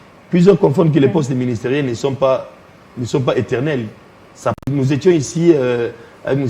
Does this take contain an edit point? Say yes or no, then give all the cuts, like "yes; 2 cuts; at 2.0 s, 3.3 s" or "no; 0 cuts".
yes; 1 cut; at 4.6 s